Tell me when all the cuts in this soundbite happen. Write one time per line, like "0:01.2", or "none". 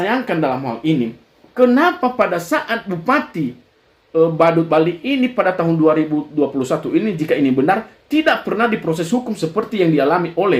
none